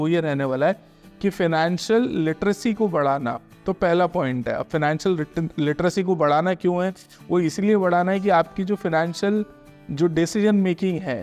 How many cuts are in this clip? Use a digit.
0